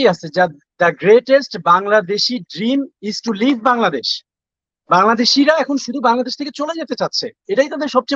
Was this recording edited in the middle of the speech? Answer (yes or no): no